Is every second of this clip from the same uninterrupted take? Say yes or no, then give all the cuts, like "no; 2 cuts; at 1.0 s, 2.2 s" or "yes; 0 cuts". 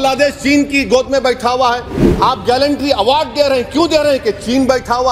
yes; 0 cuts